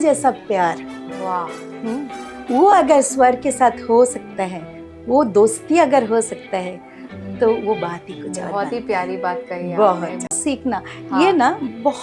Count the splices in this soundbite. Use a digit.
1